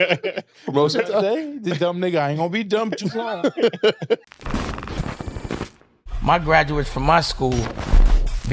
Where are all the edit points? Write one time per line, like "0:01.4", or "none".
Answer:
0:04.2